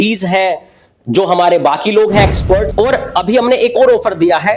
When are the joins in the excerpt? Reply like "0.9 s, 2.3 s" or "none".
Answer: 2.7 s